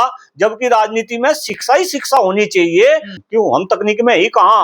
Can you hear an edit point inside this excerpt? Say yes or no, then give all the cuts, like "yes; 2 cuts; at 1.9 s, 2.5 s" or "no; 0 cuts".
yes; 1 cut; at 3.2 s